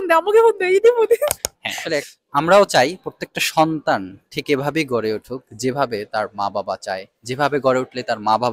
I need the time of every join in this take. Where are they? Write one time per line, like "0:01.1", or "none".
0:02.0